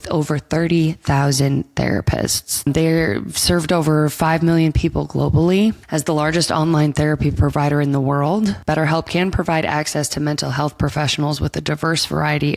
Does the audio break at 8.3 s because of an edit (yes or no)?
no